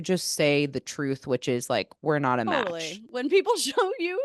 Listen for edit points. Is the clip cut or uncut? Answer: cut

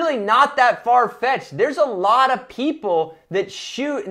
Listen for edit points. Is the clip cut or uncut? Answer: uncut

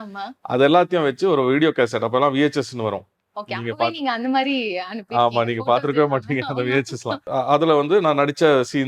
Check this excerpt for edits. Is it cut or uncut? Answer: cut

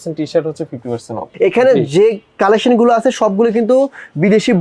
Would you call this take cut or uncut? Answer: cut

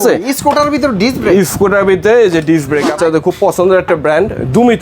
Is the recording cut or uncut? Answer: cut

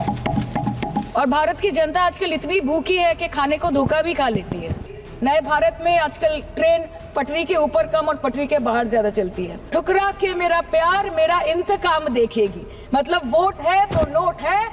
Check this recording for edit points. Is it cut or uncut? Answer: cut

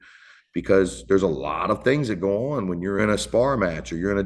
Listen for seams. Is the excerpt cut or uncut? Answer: cut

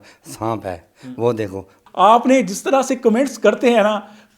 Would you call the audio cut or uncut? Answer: cut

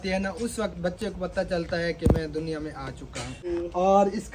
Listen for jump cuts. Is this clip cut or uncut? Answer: cut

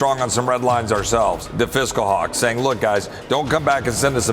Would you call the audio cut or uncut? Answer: cut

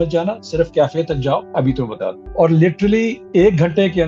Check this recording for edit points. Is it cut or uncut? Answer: cut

